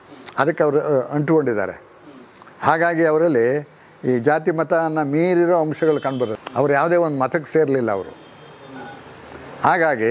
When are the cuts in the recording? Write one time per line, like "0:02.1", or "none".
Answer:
0:06.4